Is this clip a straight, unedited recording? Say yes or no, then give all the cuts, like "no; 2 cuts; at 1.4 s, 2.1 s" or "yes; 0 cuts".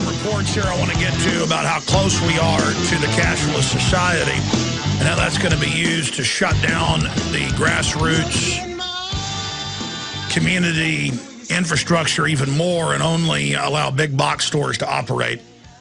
no; 1 cut; at 6.0 s